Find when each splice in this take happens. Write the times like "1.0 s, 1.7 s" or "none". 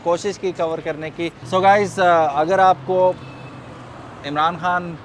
1.4 s

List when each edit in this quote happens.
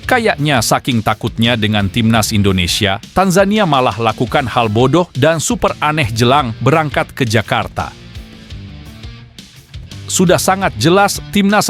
none

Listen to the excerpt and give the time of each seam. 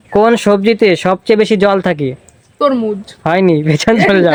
none

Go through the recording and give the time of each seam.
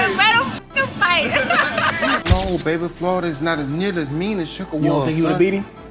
2.2 s

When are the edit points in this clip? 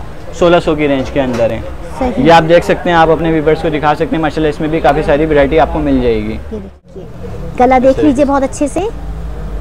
6.9 s

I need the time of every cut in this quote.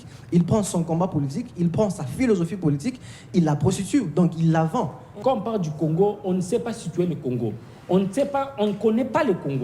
5.1 s

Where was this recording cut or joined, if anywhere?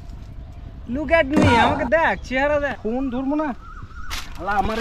2.8 s

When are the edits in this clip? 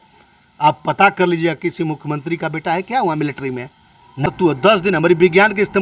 4.3 s

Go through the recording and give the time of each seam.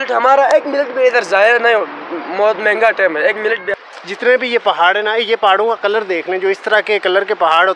3.7 s

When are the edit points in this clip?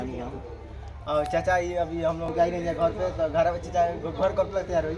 2.2 s

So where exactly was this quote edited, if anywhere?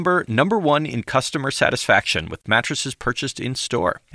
none

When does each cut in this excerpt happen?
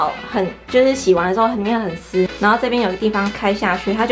2.3 s

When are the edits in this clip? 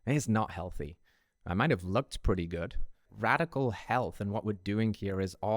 3.0 s

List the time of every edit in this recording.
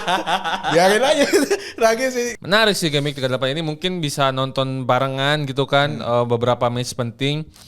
2.3 s

